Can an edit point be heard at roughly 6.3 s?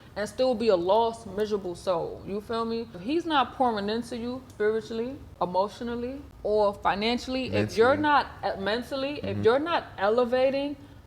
yes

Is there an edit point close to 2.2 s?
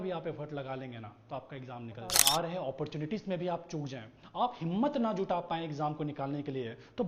yes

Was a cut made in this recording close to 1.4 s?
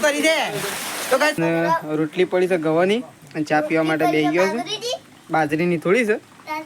yes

